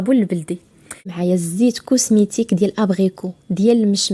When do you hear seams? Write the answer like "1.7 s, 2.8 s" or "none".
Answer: 1.1 s